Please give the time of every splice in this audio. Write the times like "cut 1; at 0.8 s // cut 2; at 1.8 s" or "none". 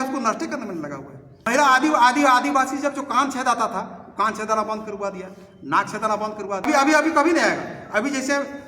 cut 1; at 1.5 s // cut 2; at 6.7 s